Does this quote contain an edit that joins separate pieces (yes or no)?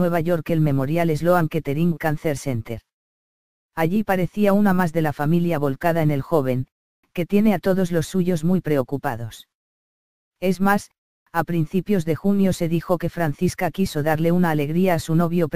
no